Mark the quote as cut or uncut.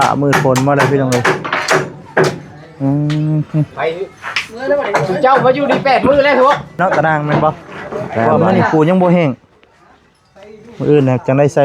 cut